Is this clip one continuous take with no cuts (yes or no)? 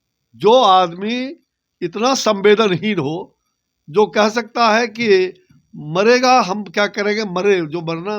yes